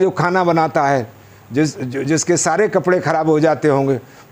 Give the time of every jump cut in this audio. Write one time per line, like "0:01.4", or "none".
none